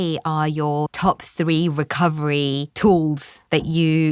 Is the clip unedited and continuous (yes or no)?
no